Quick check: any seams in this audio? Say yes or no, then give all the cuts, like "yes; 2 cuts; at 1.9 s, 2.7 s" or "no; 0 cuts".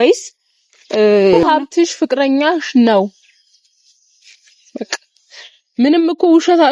yes; 1 cut; at 1.4 s